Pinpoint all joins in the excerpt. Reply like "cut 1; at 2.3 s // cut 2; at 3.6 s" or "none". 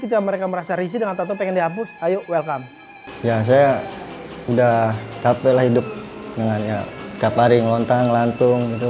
cut 1; at 3.0 s